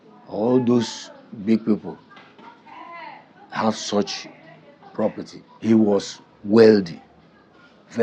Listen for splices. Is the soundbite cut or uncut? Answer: cut